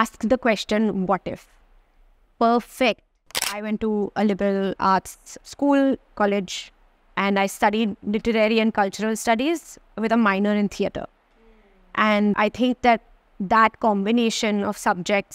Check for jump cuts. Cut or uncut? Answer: cut